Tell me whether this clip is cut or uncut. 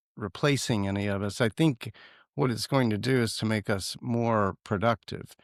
uncut